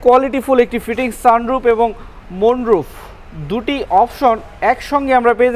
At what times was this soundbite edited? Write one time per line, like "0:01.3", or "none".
none